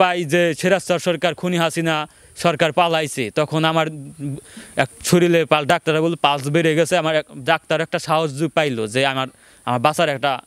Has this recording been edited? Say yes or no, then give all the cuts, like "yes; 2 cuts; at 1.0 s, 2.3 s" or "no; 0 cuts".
no; 0 cuts